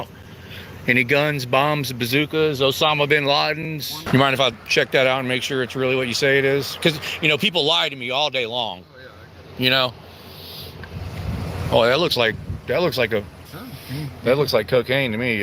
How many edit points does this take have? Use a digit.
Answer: 2